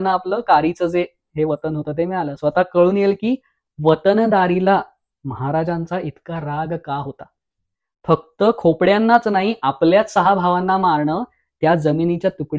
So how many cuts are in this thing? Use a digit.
0